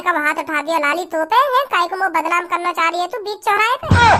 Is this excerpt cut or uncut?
uncut